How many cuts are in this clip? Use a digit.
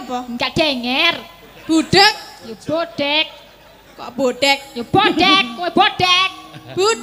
0